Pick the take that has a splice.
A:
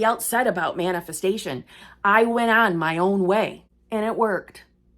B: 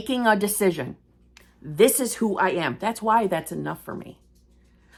A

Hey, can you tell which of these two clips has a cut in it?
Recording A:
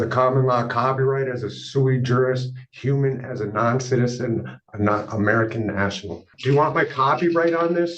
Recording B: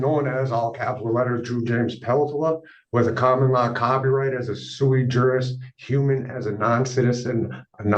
A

